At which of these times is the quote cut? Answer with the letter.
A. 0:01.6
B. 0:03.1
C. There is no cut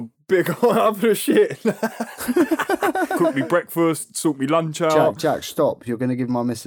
B